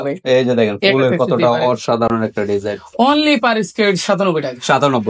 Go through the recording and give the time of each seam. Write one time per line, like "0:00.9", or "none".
none